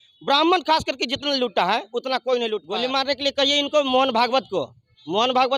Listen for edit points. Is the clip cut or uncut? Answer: cut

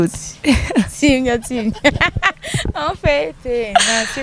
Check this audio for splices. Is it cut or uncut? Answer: uncut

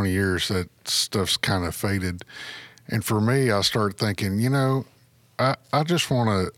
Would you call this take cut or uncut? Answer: uncut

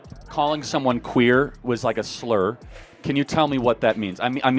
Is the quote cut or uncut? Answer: uncut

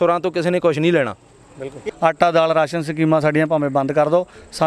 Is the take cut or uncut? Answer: cut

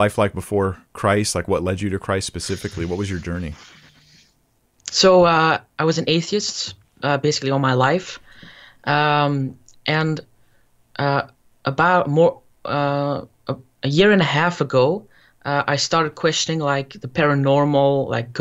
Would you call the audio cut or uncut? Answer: uncut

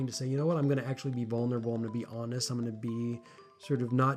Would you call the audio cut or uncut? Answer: uncut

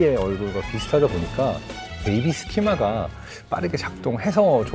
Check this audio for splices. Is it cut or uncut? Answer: cut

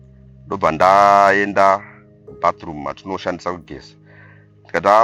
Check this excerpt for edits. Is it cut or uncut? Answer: uncut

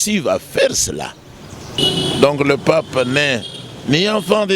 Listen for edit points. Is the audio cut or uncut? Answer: cut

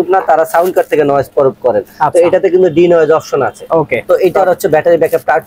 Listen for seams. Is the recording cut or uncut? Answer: cut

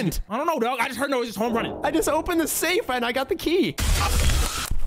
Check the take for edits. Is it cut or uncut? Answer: cut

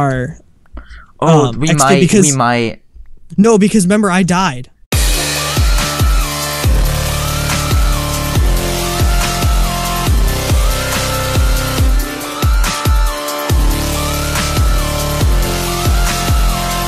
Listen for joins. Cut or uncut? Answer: uncut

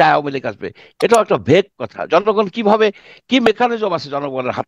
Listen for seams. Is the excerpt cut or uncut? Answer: uncut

